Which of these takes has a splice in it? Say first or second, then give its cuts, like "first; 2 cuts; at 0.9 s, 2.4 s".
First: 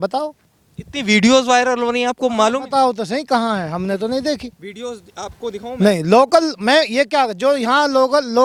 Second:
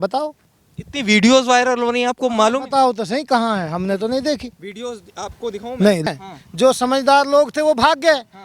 second; 1 cut; at 6.1 s